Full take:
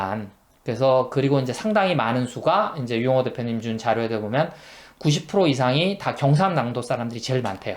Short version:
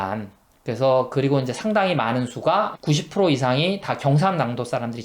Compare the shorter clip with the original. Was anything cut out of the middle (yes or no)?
yes